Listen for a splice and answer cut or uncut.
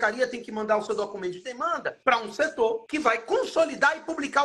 cut